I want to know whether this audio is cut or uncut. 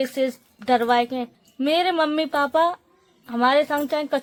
uncut